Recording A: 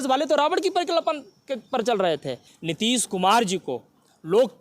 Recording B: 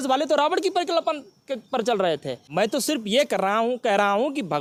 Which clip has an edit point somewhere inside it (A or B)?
A